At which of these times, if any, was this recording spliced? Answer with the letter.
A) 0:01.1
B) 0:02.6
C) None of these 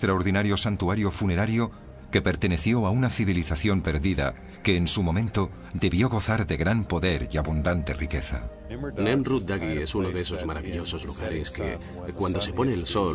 B